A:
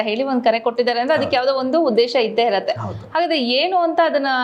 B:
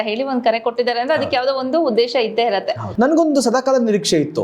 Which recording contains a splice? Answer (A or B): B